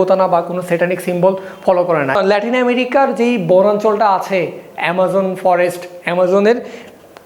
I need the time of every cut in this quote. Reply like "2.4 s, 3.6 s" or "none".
2.2 s